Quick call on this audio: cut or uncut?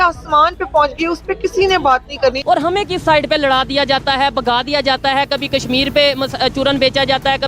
cut